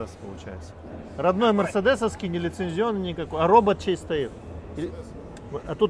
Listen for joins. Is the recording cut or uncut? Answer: uncut